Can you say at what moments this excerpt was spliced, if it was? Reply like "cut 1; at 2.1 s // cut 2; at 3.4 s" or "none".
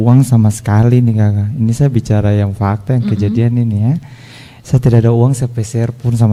none